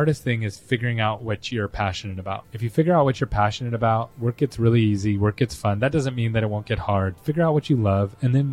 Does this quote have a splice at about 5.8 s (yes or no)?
no